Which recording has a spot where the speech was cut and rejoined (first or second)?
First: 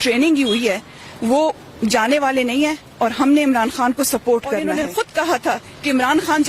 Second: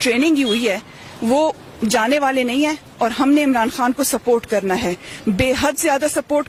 first